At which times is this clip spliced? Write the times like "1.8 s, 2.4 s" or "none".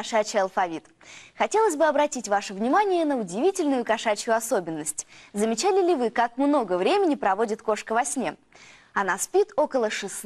none